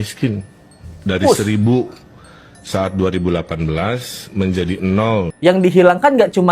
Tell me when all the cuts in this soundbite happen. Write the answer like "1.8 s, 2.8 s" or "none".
5.3 s

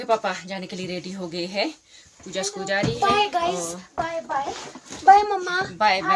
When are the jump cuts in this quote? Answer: none

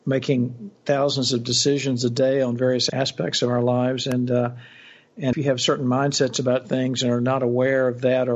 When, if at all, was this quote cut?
2.8 s, 5.4 s

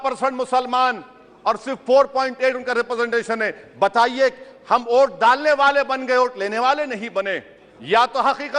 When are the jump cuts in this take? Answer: none

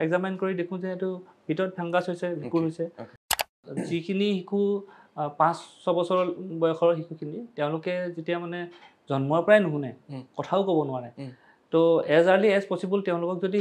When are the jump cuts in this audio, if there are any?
3.5 s

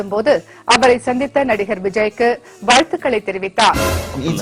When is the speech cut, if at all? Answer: none

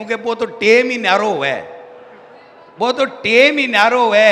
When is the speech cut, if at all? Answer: none

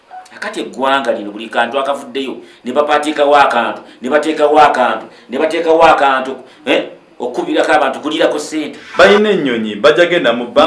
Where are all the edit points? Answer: 8.8 s

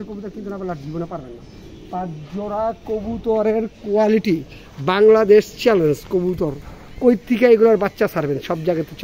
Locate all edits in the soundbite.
none

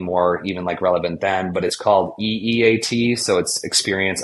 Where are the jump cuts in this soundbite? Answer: none

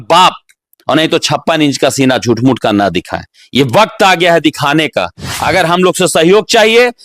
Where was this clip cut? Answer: 5.2 s

